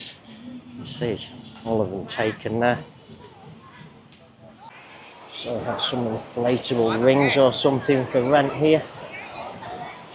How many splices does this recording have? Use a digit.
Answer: 1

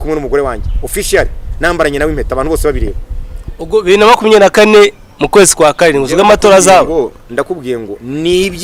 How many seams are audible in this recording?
0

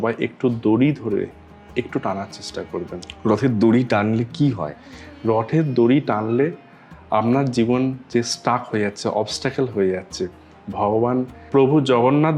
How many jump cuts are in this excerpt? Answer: 0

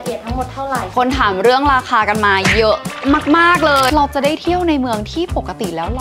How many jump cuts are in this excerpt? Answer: 2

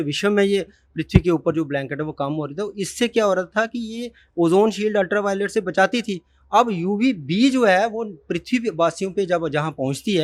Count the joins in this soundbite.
0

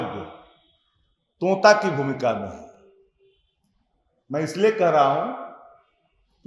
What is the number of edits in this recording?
0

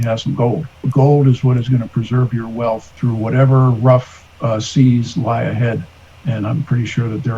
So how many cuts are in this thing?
2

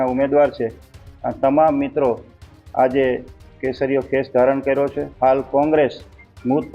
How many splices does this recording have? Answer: 1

